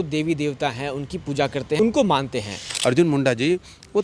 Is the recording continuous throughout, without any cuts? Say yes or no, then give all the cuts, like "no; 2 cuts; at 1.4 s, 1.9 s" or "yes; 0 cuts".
no; 2 cuts; at 1.8 s, 2.7 s